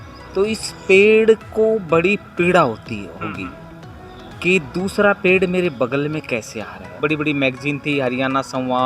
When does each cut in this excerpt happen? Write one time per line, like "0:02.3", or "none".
0:07.0

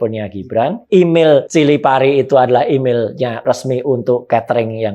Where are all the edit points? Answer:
0:00.8
0:01.5
0:03.4

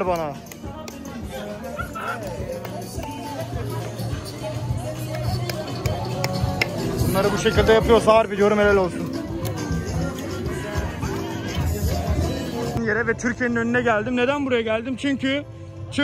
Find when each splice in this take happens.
0:12.9

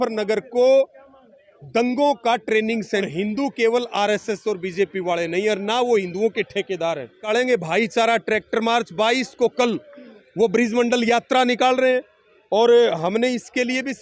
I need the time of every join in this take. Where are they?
0:03.1
0:07.2

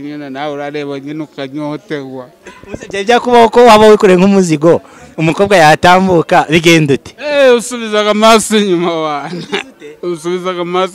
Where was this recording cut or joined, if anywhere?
none

